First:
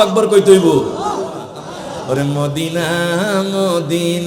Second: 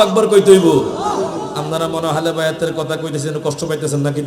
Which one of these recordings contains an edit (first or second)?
first